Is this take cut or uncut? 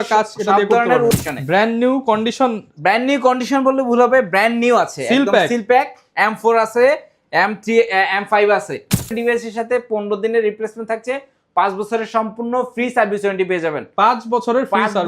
cut